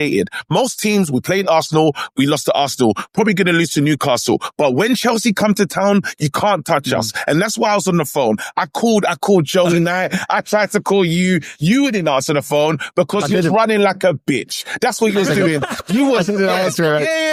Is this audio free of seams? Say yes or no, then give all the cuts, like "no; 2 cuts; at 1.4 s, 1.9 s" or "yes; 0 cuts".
yes; 0 cuts